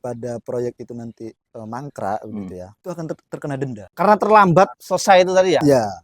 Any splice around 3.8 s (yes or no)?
yes